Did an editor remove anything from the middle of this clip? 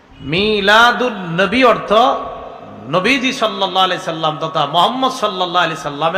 no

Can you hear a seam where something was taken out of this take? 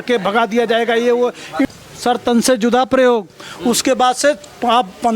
yes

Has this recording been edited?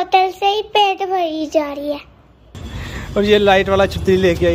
yes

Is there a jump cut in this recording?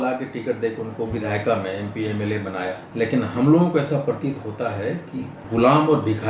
yes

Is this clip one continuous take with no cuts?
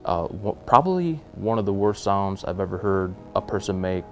no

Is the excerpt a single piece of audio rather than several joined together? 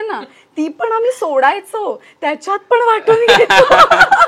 yes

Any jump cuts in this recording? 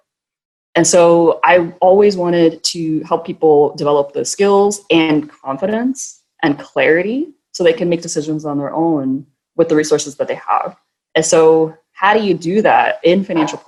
no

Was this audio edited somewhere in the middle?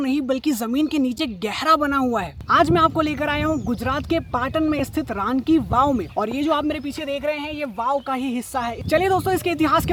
no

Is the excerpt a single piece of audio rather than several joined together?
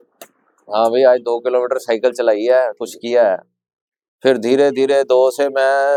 yes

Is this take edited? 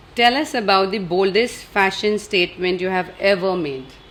no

